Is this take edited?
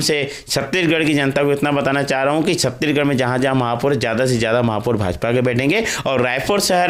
no; 0 cuts

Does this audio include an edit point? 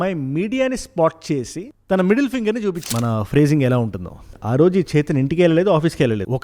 yes; 1 cut; at 2.9 s

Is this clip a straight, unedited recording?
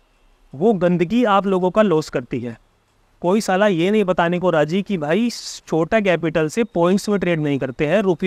yes; 0 cuts

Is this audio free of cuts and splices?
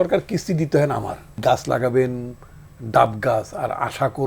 no; 1 cut; at 1.4 s

